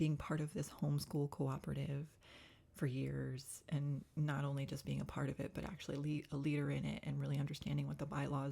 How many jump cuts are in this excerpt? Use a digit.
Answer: 0